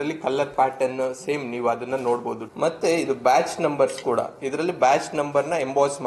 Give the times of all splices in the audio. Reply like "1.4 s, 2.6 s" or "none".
2.4 s